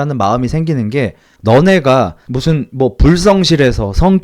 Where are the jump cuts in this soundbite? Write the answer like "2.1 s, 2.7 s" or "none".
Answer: 1.3 s, 2.2 s